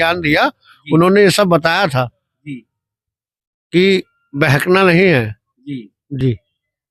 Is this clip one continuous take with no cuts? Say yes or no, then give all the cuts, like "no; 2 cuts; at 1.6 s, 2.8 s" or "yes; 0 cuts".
yes; 0 cuts